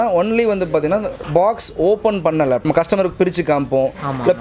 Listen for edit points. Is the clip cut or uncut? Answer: cut